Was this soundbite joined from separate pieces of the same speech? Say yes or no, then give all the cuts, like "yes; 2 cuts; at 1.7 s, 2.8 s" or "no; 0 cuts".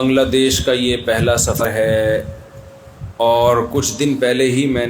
yes; 1 cut; at 1.6 s